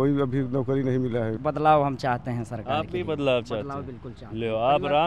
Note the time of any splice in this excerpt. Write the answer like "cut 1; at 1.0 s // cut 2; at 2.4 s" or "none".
cut 1; at 1.3 s